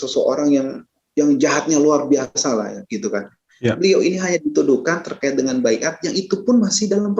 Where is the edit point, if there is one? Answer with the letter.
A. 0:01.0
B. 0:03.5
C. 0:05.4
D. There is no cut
A